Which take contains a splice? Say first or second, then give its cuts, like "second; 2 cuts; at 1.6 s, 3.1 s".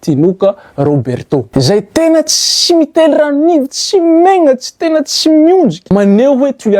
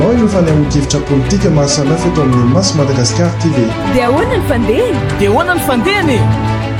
first; 2 cuts; at 1.5 s, 5.8 s